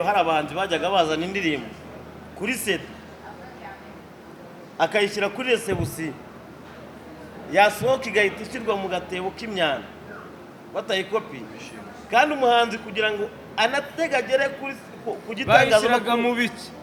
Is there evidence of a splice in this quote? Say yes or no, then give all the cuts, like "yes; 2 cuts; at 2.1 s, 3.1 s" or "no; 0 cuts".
no; 0 cuts